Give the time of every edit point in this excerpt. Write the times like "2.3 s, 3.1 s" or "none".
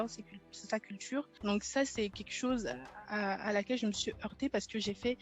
1.3 s